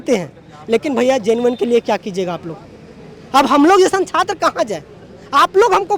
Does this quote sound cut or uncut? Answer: uncut